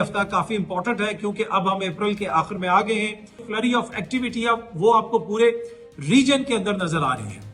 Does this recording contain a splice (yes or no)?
yes